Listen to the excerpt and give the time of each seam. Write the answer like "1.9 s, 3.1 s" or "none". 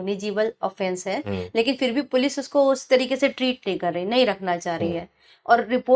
none